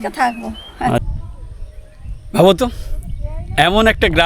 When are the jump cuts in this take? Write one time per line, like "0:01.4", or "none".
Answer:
0:01.1